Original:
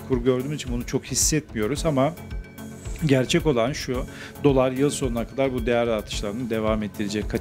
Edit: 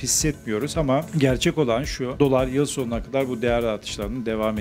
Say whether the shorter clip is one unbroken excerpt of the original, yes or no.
no